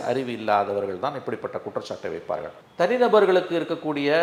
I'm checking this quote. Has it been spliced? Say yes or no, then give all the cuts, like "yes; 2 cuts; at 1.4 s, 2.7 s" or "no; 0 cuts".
no; 0 cuts